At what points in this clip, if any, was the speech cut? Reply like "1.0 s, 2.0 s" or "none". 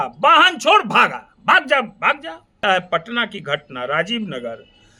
2.6 s

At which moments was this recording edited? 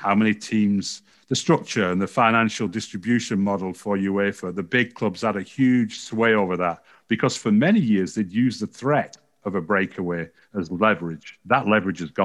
11.4 s

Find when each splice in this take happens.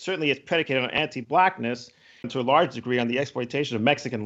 2.3 s

